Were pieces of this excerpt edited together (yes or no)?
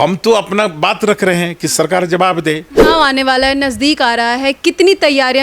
yes